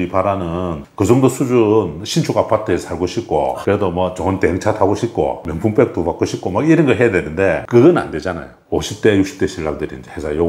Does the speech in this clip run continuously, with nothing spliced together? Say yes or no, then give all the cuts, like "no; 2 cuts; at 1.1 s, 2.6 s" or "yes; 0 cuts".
no; 1 cut; at 8.6 s